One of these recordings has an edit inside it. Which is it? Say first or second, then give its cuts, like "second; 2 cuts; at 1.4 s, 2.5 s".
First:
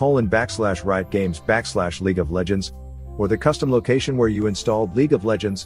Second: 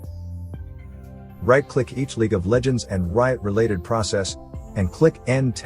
second; 1 cut; at 1.0 s